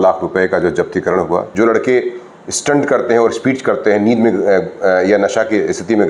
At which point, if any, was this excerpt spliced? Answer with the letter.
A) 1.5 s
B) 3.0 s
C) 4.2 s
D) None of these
A